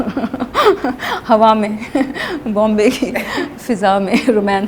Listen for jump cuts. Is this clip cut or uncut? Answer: uncut